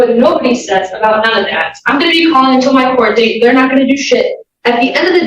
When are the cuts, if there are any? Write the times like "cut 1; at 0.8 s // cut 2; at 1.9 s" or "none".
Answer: cut 1; at 2.9 s